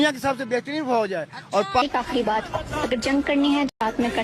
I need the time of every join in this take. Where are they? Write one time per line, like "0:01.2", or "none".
0:01.8